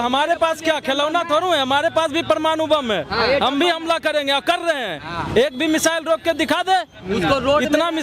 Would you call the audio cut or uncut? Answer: uncut